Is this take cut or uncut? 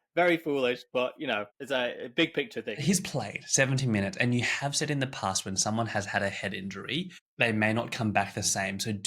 cut